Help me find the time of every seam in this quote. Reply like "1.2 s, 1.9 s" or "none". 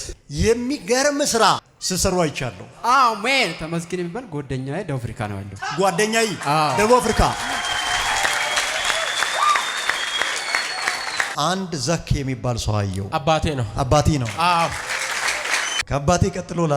11.3 s, 15.8 s